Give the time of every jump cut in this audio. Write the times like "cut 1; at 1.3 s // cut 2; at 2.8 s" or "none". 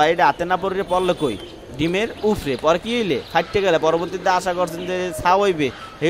none